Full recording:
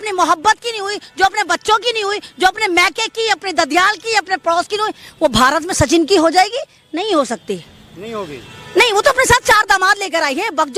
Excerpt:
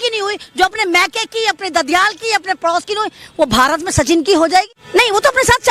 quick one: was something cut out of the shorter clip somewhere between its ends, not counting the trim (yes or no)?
yes